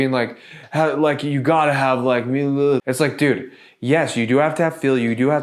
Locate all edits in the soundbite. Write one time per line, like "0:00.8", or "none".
0:02.8